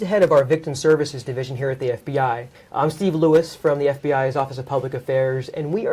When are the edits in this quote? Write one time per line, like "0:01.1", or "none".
0:02.6

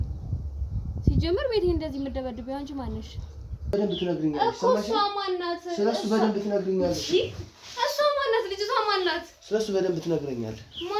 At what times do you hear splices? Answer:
0:03.7

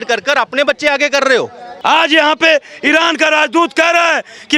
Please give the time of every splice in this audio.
0:01.6

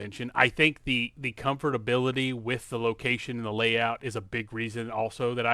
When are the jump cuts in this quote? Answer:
none

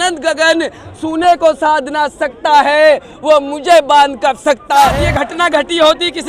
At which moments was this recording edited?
0:04.9

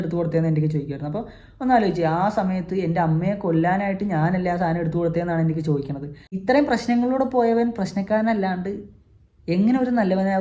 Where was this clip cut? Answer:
0:06.4

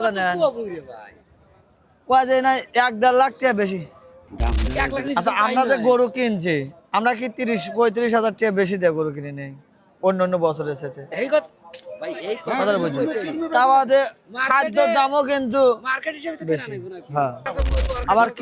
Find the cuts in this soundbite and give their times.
0:04.6
0:17.5

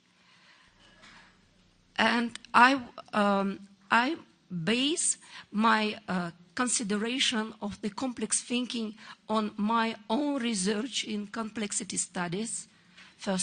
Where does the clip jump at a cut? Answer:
0:01.1

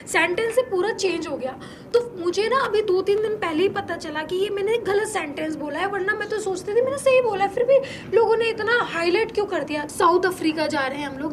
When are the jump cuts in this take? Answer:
0:09.9

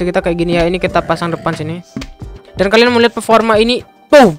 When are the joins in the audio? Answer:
none

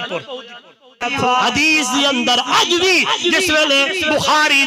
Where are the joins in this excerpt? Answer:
0:01.1

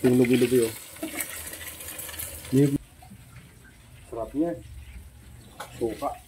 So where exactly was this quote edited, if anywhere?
0:02.8

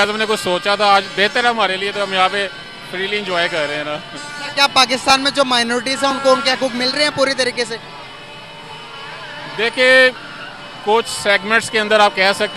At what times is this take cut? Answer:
none

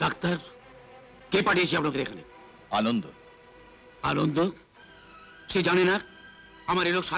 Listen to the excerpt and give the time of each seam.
none

